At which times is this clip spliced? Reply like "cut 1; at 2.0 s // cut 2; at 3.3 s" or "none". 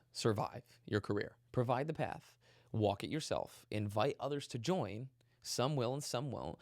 cut 1; at 1.4 s